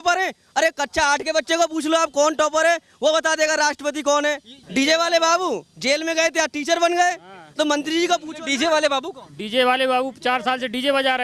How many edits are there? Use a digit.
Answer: 1